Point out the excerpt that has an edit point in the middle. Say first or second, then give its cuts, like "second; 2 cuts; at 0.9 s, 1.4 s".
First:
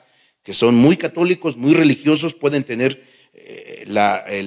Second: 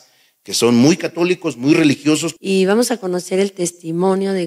second; 1 cut; at 2.3 s